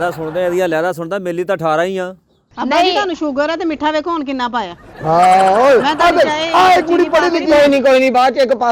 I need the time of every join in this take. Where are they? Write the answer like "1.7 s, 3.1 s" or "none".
2.5 s